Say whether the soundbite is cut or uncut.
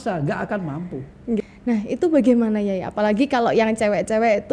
cut